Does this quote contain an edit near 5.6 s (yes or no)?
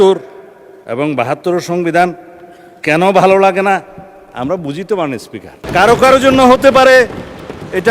yes